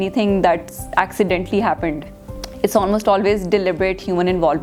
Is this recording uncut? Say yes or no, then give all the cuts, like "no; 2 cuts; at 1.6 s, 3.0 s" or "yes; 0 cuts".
yes; 0 cuts